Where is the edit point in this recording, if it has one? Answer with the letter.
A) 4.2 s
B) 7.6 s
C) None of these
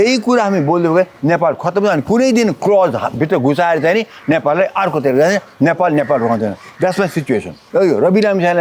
B